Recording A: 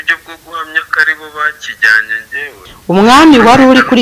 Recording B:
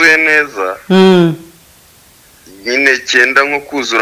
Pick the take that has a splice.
A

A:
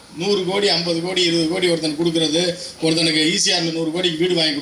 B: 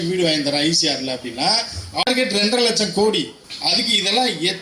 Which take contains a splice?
B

